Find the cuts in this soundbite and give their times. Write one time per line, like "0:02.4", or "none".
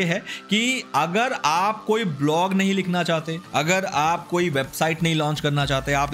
none